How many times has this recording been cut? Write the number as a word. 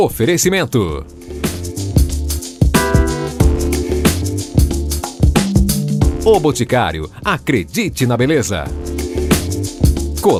zero